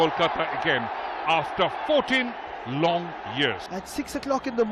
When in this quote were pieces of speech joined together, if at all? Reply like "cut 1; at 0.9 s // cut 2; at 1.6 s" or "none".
cut 1; at 3.7 s